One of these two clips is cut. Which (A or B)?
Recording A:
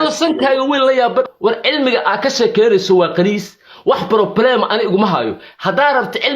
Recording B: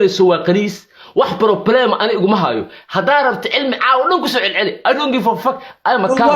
A